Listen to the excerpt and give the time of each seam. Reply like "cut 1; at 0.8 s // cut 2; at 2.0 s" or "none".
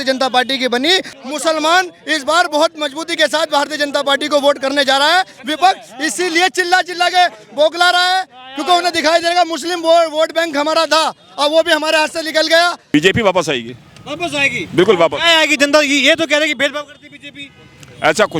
cut 1; at 1.1 s // cut 2; at 12.8 s